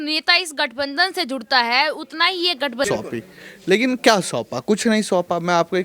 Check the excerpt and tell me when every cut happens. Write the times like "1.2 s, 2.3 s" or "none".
2.9 s